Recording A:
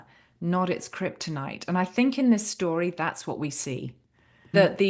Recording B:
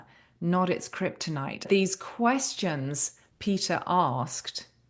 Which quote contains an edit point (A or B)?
B